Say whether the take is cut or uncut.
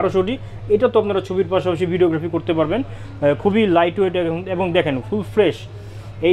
uncut